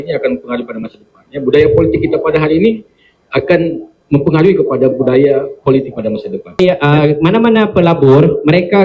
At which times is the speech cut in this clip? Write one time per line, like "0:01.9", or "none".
0:06.6